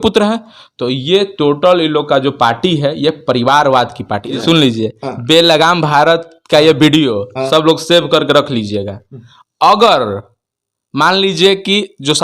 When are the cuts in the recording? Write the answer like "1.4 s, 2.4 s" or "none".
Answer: 4.3 s